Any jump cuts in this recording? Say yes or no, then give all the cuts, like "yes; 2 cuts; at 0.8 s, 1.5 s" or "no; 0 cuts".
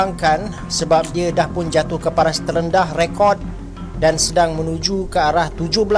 no; 0 cuts